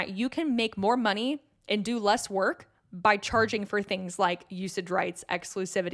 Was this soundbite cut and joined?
no; 0 cuts

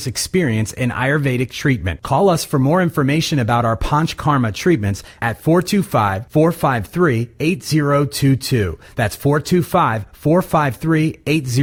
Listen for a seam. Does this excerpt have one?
no; 0 cuts

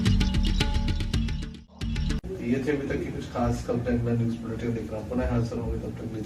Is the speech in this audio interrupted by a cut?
no; 0 cuts

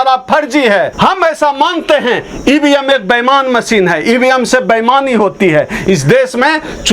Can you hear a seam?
yes; 1 cut; at 0.9 s

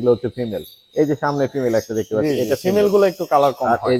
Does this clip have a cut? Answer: no; 0 cuts

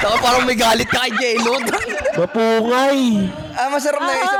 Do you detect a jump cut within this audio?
no; 0 cuts

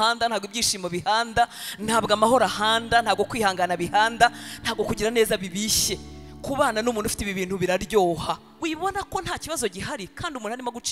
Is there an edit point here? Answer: yes; 1 cut; at 8.5 s

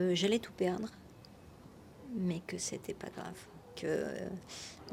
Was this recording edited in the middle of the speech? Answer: no; 0 cuts

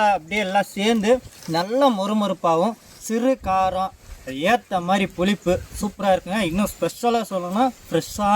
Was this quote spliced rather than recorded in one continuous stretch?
yes; 2 cuts; at 1.4 s, 4.0 s

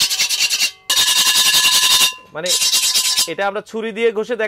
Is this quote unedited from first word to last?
no; 1 cut; at 0.9 s

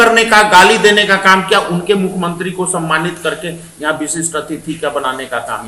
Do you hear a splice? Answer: no; 0 cuts

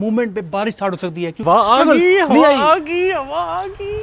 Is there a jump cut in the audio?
yes; 1 cut; at 1.4 s

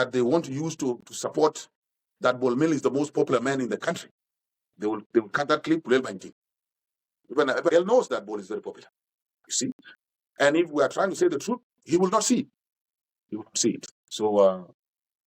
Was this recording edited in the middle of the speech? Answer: yes; 1 cut; at 7.7 s

